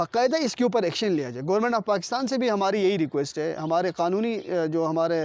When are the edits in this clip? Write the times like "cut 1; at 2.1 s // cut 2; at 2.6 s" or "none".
none

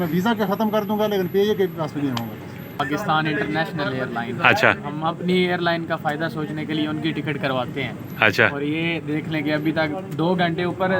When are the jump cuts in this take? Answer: cut 1; at 2.8 s

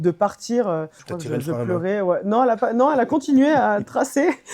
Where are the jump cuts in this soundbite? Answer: cut 1; at 1.0 s

